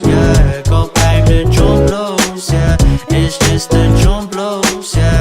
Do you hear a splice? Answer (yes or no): yes